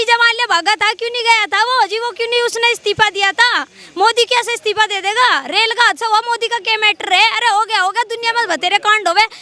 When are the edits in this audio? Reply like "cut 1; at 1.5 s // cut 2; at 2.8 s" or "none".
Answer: none

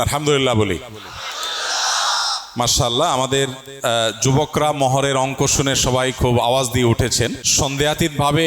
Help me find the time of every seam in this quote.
cut 1; at 7.4 s

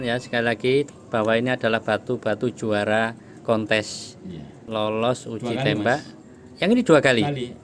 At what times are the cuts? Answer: cut 1; at 0.9 s // cut 2; at 4.6 s

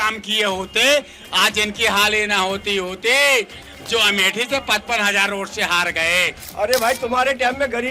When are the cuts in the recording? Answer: cut 1; at 6.4 s

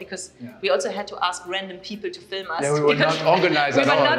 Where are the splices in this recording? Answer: none

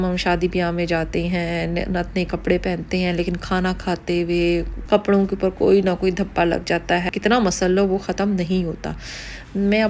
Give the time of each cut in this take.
cut 1; at 4.7 s // cut 2; at 7.1 s

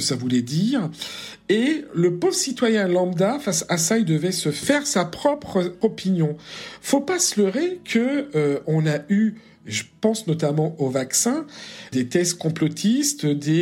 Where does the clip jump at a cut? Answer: cut 1; at 4.7 s // cut 2; at 5.8 s // cut 3; at 11.9 s

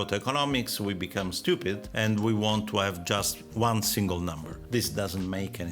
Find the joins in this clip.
cut 1; at 4.5 s

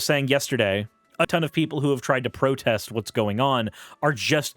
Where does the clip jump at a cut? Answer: cut 1; at 1.3 s

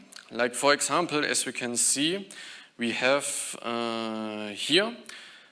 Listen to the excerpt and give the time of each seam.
none

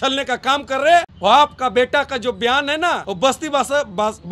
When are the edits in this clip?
cut 1; at 1.1 s // cut 2; at 3.1 s

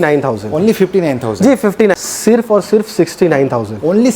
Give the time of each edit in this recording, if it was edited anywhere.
cut 1; at 1.9 s

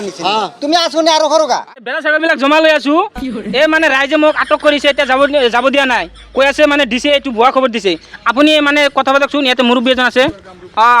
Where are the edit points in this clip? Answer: cut 1; at 1.5 s

